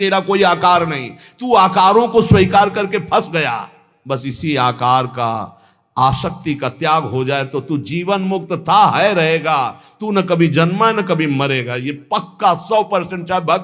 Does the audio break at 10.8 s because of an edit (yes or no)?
no